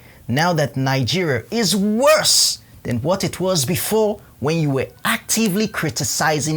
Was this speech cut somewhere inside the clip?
no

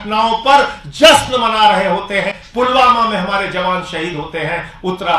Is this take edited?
yes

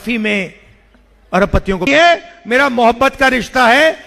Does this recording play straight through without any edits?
no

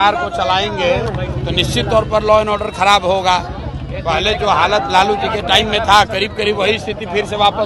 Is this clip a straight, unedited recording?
yes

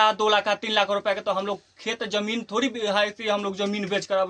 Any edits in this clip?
no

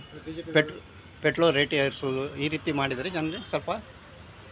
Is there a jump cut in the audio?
no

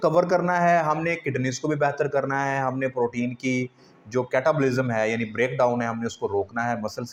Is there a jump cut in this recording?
no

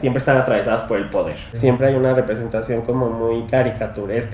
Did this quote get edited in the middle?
yes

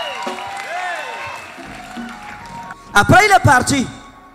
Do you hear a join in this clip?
yes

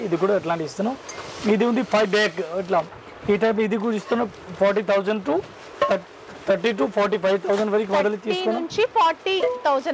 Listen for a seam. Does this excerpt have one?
no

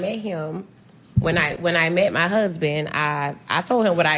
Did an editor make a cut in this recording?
yes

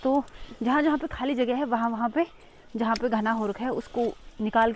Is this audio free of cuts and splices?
yes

